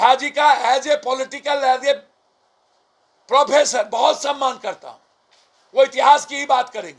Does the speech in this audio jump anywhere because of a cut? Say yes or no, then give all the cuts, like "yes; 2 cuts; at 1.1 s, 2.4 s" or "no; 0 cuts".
no; 0 cuts